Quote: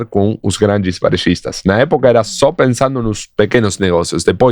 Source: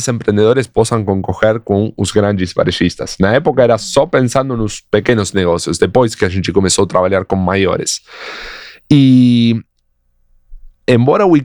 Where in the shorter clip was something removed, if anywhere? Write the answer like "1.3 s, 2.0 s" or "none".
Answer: none